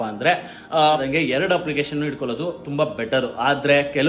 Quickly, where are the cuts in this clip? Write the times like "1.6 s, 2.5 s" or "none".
1.0 s